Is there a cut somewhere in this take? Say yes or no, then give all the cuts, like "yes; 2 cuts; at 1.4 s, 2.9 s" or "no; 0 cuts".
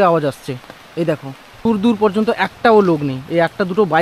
yes; 1 cut; at 1.6 s